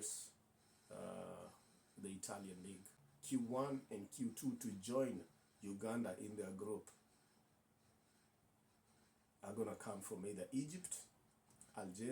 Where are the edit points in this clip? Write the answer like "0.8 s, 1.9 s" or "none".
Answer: 2.9 s